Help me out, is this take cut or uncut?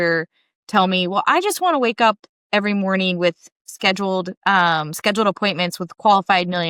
uncut